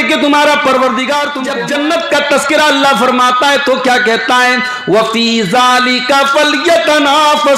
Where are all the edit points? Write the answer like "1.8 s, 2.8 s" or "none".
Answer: 1.4 s